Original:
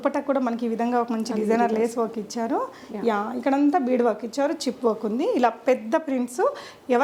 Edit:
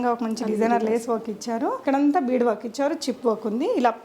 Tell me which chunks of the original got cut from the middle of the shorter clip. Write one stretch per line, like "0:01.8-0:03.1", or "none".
0:02.7-0:03.4

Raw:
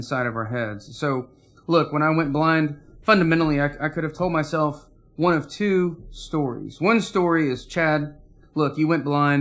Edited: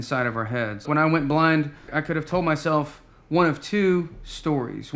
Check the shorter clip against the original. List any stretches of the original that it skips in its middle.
0:00.8-0:01.9
0:02.9-0:03.8

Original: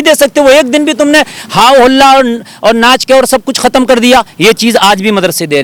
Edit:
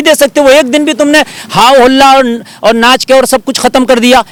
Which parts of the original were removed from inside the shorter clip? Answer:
none

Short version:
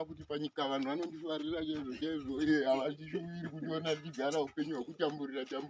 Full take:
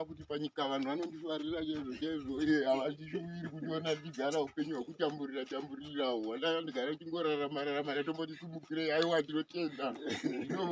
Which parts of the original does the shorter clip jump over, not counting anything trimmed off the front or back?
none

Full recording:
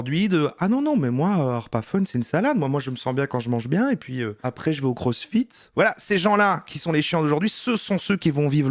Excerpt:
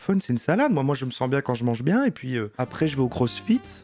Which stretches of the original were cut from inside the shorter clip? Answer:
none

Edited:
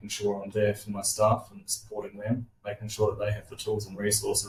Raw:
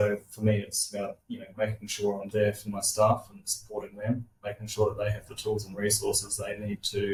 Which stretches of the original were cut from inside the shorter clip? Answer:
none

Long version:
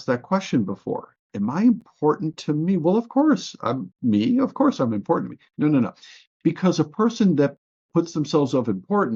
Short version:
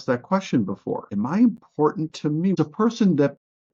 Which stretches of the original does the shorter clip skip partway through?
0:01.1-0:01.3
0:02.8-0:06.8

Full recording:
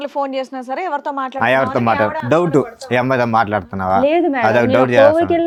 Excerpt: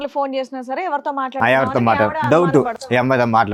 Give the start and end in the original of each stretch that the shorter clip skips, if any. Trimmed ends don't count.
none

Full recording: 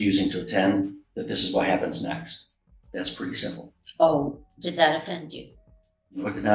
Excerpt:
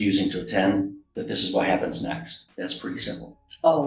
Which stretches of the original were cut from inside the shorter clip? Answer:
0:02.4-0:02.7

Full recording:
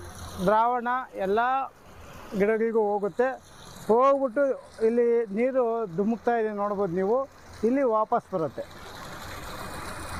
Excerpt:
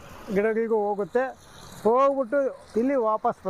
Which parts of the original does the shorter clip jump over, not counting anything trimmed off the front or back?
0:04.6-0:07.5

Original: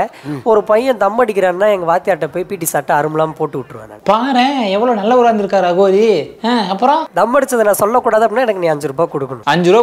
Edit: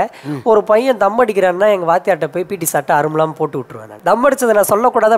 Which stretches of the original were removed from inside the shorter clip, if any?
0:04.0-0:07.1

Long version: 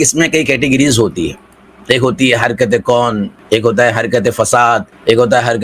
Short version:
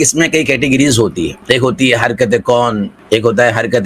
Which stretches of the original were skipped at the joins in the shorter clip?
0:01.3-0:01.7

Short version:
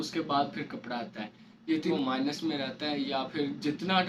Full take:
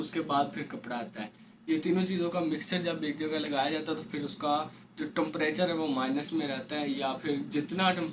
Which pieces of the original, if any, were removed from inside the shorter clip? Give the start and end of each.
0:01.9-0:05.8

